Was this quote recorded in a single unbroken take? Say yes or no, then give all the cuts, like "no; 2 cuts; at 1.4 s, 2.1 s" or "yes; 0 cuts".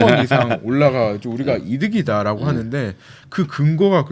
yes; 0 cuts